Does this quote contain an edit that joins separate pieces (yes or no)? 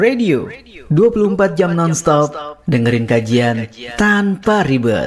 no